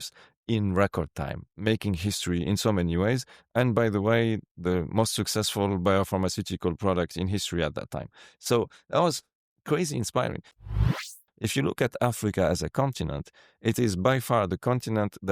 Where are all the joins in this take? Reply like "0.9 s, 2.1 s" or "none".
10.7 s

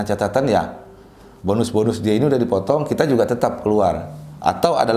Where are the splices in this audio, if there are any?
none

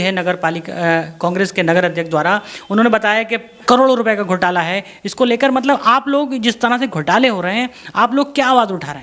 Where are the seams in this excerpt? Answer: 3.6 s

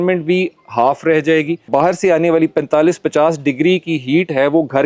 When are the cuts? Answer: 1.7 s

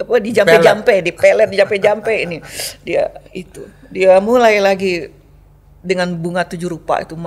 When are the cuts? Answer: none

